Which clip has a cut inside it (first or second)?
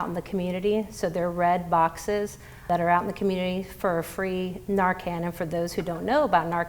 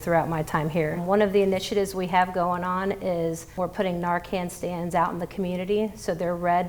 second